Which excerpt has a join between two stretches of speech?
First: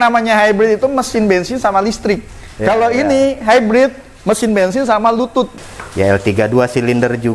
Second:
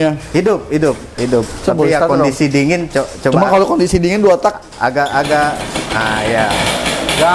first; 1 cut; at 5.5 s

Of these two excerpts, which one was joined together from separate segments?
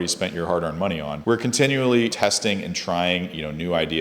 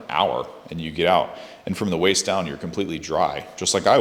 first; 2 cuts; at 1.1 s, 2.1 s

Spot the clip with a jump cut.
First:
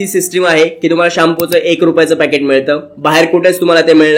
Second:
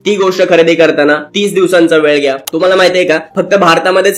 second; 1 cut; at 2.4 s

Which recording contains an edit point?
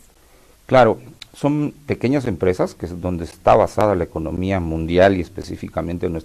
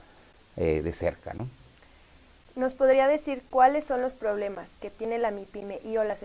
first; 1 cut; at 4.3 s

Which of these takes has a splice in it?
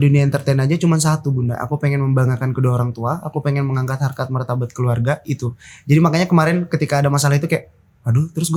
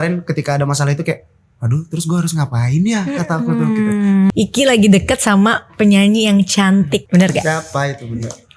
second; 2 cuts; at 4.3 s, 7.0 s

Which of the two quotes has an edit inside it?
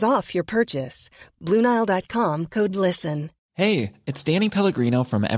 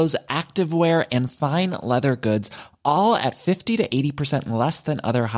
first; 1 cut; at 3.4 s

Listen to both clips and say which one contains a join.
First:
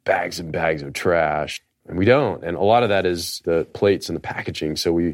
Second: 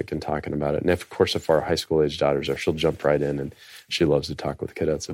first; 2 cuts; at 1.7 s, 3.6 s

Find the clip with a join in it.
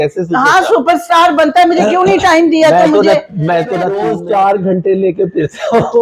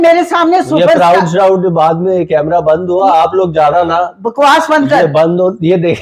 first; 1 cut; at 4.0 s

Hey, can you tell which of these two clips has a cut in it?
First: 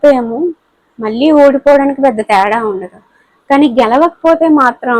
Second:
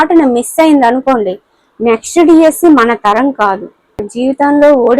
second; 1 cut; at 4.1 s

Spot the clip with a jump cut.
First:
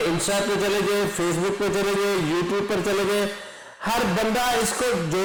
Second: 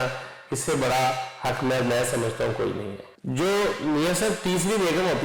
second; 1 cut; at 3.2 s

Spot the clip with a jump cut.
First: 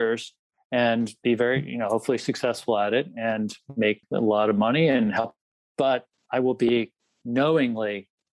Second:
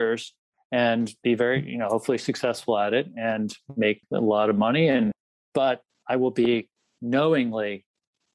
second; 1 cut; at 5.1 s

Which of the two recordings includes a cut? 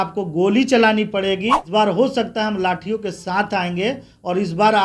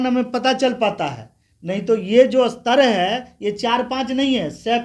first; 1 cut; at 1.6 s

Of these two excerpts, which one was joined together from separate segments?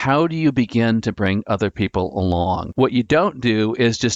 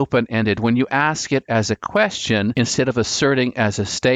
first; 1 cut; at 2.7 s

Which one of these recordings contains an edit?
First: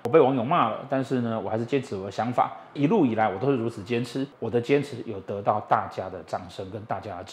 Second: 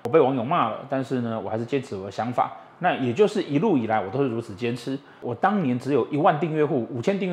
first; 2 cuts; at 2.8 s, 4.4 s

